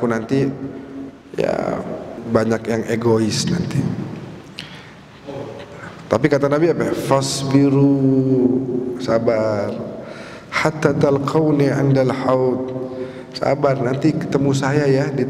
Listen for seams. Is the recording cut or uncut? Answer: cut